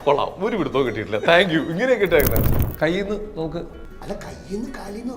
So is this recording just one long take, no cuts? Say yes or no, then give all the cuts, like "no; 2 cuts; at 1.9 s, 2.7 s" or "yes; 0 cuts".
no; 2 cuts; at 2.5 s, 3.9 s